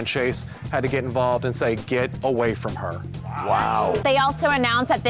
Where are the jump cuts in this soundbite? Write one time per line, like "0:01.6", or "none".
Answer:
0:04.0

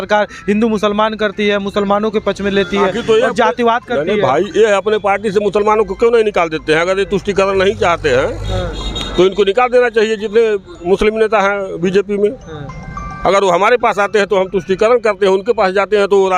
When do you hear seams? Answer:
none

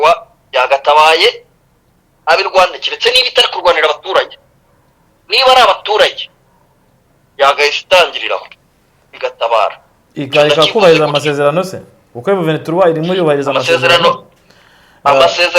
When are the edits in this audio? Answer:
none

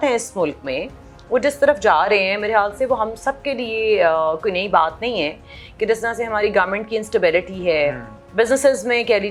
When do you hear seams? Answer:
none

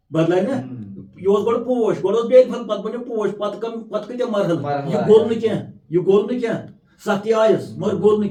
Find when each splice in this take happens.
none

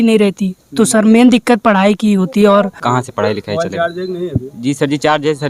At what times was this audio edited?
0:02.8

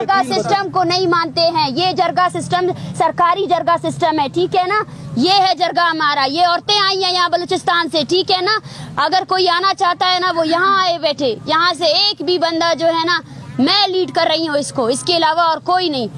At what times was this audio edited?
none

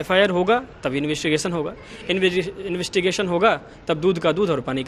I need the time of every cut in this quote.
none

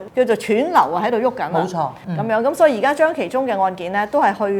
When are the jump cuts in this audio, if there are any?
0:02.0

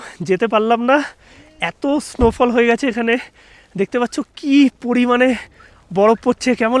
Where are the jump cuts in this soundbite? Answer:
none

